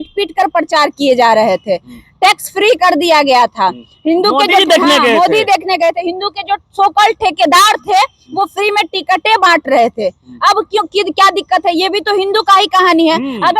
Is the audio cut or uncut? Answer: uncut